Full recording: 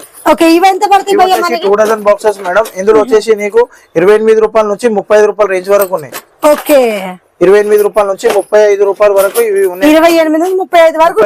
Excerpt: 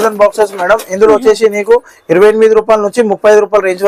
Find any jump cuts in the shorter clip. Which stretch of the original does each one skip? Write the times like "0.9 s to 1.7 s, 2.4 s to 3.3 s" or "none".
none